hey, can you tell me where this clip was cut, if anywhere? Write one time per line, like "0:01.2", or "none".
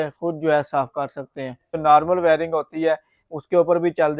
0:01.8